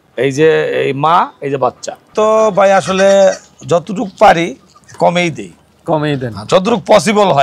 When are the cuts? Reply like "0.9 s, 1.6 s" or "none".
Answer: 2.1 s